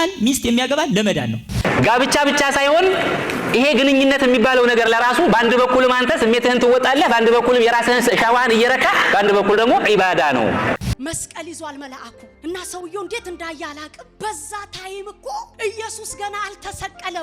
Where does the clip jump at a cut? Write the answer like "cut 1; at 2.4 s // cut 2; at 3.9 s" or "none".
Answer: cut 1; at 1.4 s // cut 2; at 10.9 s